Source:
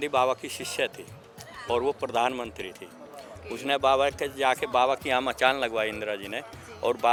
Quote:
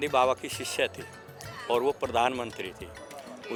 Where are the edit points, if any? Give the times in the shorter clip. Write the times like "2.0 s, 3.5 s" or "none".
none